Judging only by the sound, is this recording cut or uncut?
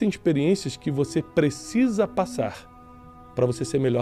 uncut